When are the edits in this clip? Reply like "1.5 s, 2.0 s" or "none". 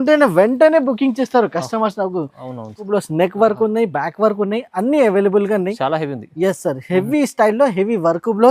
2.8 s